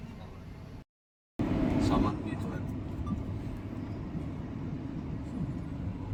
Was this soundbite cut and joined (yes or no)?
no